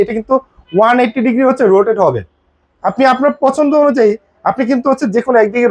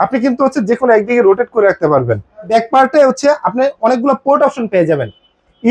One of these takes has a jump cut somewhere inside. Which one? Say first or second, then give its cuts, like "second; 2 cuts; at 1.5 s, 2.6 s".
second; 1 cut; at 2.5 s